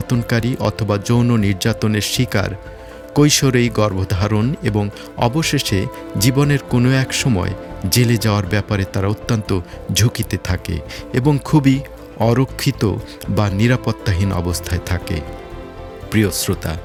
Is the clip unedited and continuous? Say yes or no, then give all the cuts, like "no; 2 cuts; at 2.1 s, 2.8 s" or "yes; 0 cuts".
yes; 0 cuts